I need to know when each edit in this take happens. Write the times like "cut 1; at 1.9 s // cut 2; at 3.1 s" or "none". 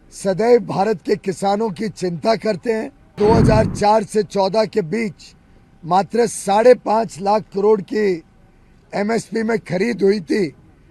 cut 1; at 3.1 s